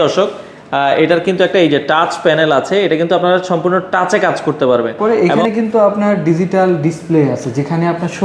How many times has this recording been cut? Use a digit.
1